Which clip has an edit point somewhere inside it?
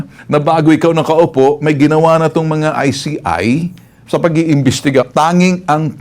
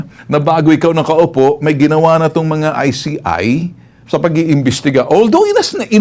first; 1 cut; at 5.1 s

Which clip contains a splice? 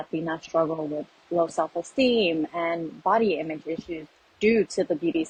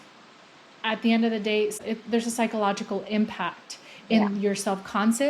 second; 1 cut; at 1.8 s

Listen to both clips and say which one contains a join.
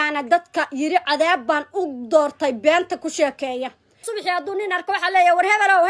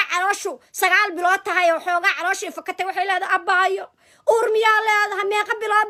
first; 1 cut; at 4.1 s

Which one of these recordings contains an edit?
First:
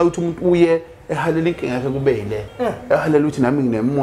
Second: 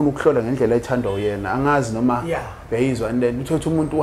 first; 1 cut; at 2.4 s

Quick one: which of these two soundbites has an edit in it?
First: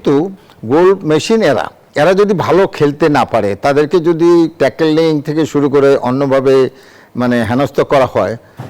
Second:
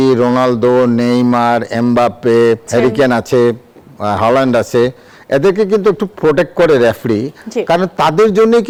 first; 1 cut; at 1.8 s

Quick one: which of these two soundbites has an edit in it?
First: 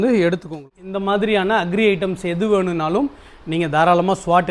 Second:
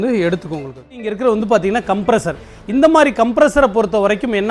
second; 1 cut; at 1.0 s

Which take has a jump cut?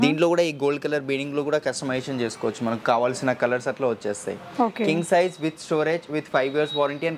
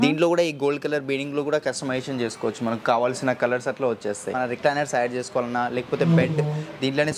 second; 1 cut; at 4.3 s

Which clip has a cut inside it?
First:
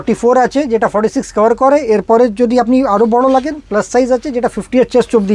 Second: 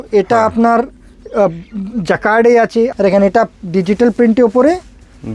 second; 1 cut; at 2.9 s

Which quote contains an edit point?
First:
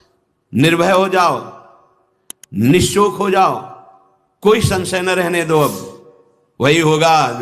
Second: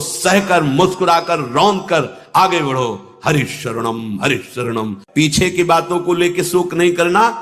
second; 1 cut; at 5.0 s

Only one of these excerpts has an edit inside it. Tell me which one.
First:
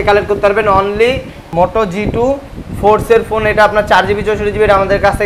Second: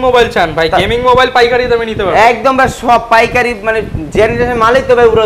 first; 1 cut; at 1.4 s

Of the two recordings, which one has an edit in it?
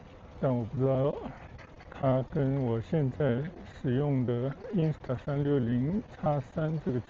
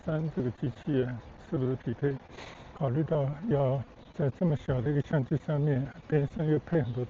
second; 1 cut; at 2.7 s

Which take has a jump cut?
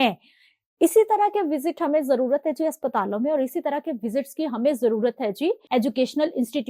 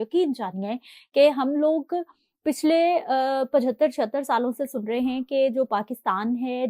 first; 1 cut; at 5.6 s

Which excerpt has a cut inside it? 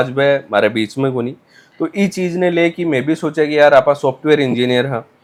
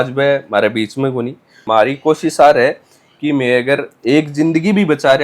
second; 1 cut; at 1.6 s

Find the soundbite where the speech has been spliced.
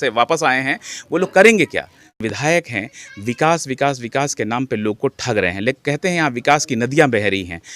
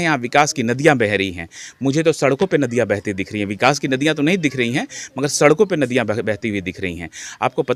first; 1 cut; at 2.2 s

